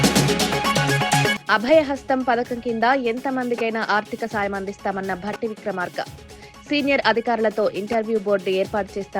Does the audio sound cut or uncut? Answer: cut